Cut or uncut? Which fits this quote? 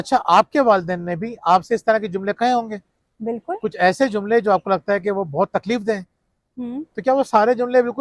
uncut